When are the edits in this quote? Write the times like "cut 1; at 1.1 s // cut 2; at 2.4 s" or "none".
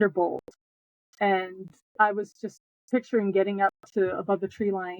cut 1; at 1.8 s